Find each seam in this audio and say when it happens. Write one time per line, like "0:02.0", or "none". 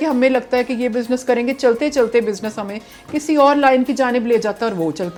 none